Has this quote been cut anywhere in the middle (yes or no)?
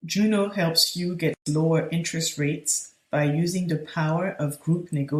no